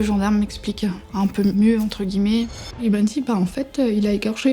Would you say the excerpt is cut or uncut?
cut